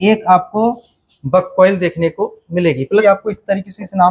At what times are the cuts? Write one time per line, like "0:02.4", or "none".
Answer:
0:03.0